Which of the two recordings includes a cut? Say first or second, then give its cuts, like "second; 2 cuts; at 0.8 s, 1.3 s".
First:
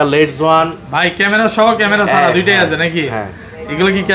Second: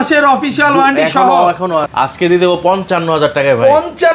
second; 1 cut; at 1.9 s